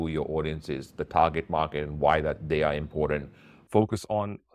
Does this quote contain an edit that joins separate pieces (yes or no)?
yes